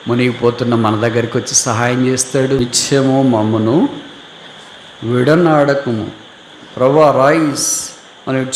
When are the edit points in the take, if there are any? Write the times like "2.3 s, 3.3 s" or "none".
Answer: 2.6 s